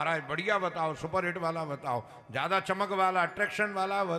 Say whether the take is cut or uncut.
uncut